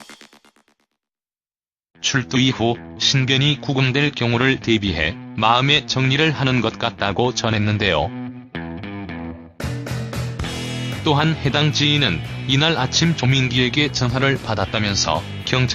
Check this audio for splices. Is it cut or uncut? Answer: cut